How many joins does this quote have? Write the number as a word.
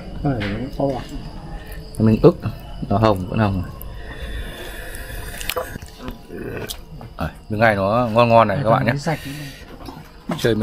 one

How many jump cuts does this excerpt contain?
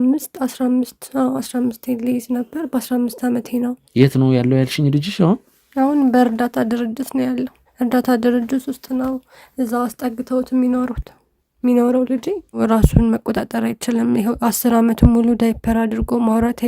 three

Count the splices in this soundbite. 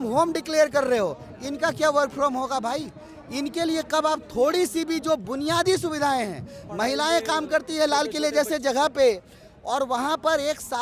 zero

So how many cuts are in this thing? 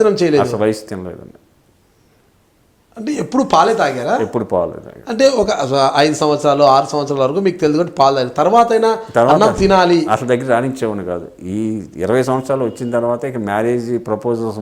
zero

